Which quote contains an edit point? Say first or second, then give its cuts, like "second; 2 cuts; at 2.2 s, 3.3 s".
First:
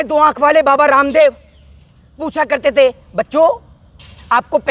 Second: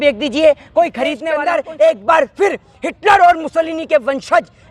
second; 1 cut; at 1.2 s